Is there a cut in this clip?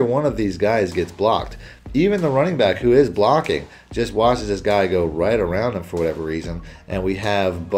no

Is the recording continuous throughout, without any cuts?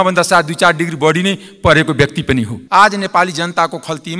no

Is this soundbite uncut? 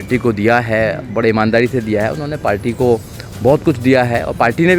yes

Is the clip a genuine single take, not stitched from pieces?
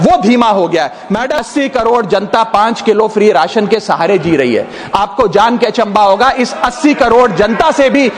no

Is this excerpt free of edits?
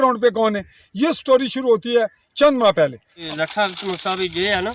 no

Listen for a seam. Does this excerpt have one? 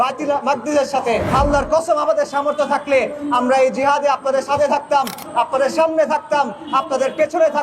yes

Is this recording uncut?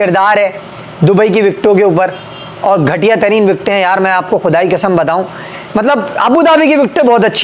yes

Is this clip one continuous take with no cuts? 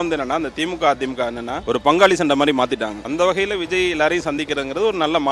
no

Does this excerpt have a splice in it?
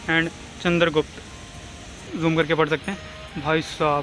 yes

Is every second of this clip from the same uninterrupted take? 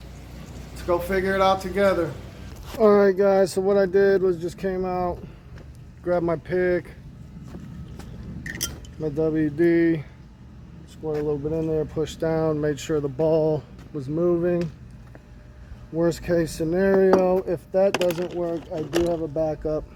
yes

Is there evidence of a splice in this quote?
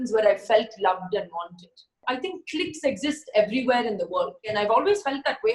yes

